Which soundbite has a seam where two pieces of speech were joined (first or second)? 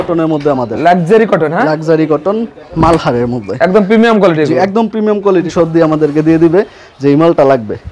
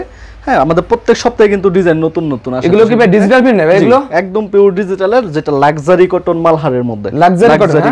first